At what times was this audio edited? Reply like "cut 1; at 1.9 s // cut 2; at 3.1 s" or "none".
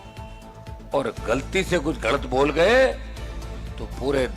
cut 1; at 0.9 s